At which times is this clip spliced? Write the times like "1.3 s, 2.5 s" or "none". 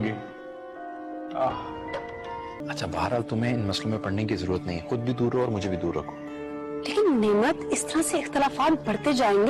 2.6 s